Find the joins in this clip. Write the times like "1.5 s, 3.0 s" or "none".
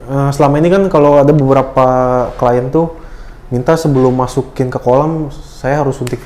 none